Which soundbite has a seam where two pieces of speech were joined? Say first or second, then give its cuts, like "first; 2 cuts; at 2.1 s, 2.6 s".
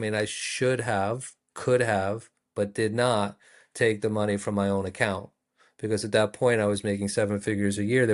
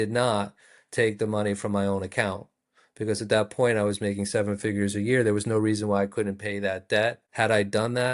second; 1 cut; at 7.2 s